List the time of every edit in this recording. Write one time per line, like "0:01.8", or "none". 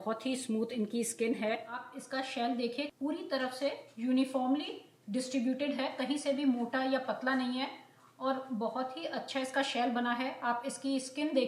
0:01.7
0:02.9